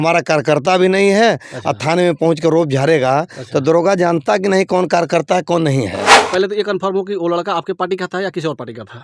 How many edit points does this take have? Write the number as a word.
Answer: one